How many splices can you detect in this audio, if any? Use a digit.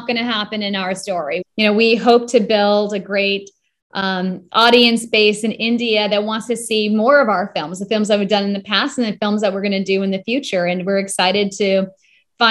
1